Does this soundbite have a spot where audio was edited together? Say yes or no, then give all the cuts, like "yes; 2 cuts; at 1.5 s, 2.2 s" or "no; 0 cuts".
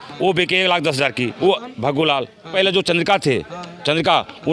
yes; 2 cuts; at 1.3 s, 2.5 s